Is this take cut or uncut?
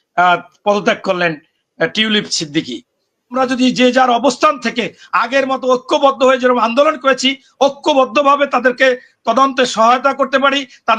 cut